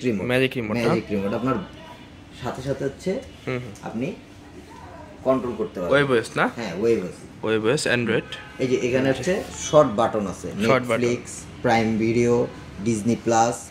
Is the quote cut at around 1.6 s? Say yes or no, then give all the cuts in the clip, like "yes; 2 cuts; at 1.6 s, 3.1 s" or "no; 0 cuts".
no; 0 cuts